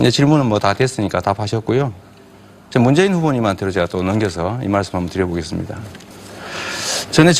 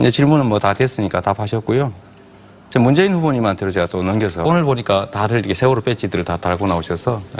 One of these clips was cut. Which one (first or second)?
first